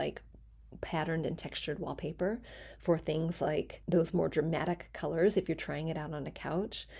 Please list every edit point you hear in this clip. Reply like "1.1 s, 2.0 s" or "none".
3.8 s